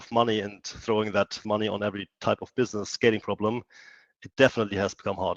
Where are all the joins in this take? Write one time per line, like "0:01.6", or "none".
0:01.4

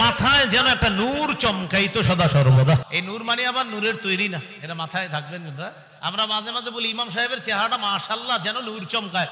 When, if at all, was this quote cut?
0:02.9

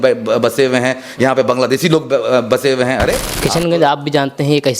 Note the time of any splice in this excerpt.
0:03.3

